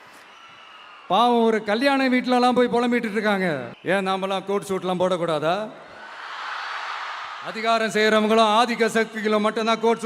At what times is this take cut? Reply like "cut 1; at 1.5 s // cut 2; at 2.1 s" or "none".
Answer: cut 1; at 3.7 s // cut 2; at 7.4 s